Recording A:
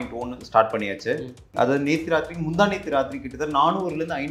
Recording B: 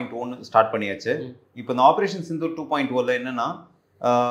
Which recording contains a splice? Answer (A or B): A